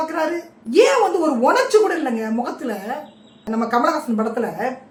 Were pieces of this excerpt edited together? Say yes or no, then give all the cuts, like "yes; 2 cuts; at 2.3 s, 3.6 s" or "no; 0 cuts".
no; 0 cuts